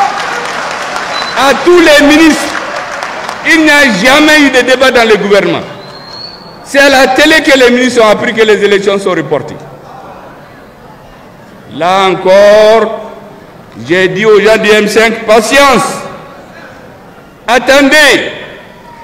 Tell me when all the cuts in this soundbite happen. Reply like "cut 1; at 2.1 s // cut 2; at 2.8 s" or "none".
none